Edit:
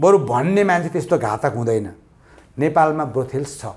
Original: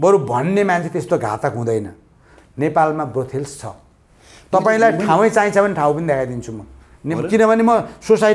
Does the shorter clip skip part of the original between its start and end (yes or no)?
no